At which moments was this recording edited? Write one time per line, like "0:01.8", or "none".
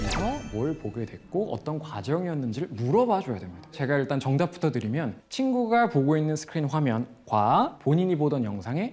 0:03.8

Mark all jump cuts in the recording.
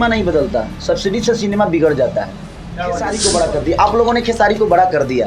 0:03.2

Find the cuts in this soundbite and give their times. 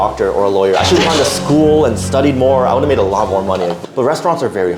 0:03.8

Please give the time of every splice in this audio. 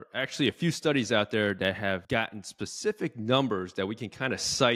0:02.0

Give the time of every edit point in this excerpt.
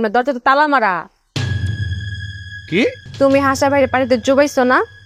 0:03.0

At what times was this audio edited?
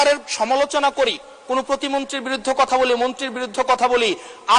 none

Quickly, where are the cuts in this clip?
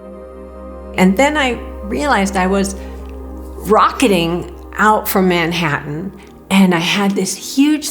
0:00.9

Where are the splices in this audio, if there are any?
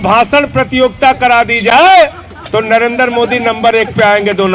none

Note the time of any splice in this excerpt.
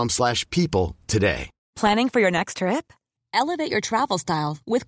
0:01.5

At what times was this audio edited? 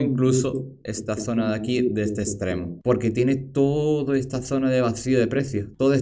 0:02.8

